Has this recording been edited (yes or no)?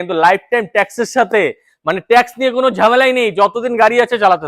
no